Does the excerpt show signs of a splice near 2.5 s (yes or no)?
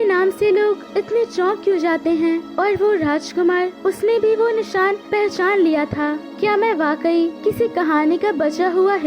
yes